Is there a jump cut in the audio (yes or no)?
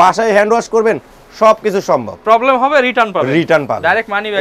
no